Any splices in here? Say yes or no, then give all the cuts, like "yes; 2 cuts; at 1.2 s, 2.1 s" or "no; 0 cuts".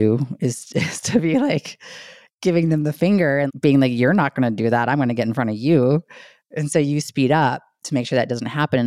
yes; 1 cut; at 3.5 s